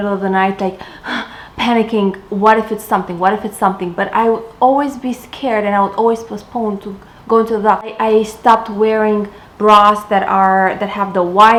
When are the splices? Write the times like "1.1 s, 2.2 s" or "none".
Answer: none